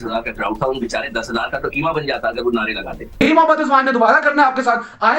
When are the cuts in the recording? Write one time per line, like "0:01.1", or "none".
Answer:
0:03.1